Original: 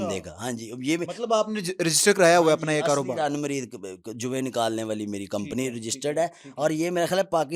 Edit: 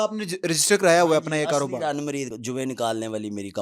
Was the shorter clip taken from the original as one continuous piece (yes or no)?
no